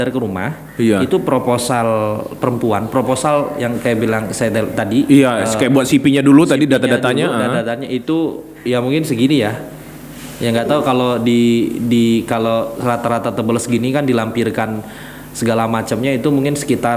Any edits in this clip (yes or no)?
no